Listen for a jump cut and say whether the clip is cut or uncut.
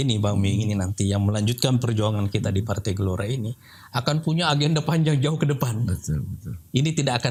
uncut